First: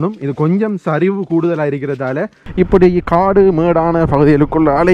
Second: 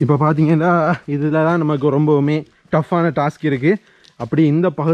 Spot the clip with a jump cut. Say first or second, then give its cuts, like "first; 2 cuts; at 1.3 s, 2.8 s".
first; 1 cut; at 2.4 s